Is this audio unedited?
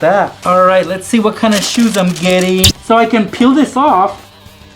no; 1 cut; at 2.7 s

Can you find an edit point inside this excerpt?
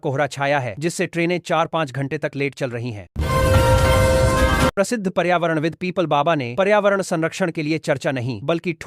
yes; 2 cuts; at 3.0 s, 4.7 s

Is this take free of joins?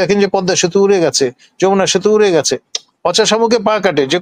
yes; 0 cuts

